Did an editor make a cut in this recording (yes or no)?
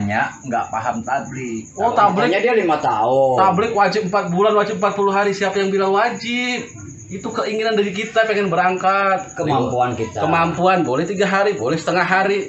no